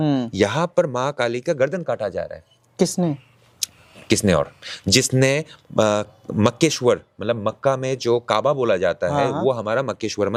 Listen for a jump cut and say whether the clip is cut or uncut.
uncut